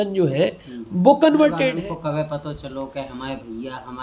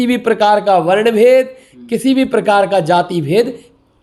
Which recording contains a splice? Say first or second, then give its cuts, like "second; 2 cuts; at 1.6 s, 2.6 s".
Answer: first; 1 cut; at 1.7 s